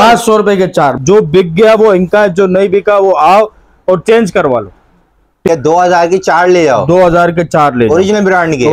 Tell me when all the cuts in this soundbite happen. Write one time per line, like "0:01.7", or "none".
0:00.9
0:05.5